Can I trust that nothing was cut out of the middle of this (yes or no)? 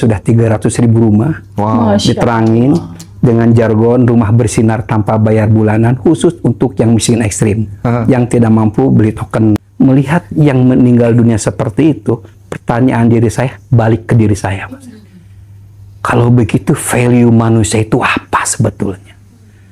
no